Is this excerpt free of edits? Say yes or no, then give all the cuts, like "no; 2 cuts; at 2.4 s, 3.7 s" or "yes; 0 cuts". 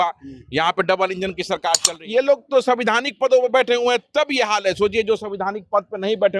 no; 1 cut; at 1.8 s